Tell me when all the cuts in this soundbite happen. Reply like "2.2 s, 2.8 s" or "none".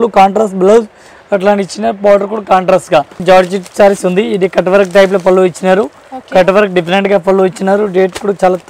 3.2 s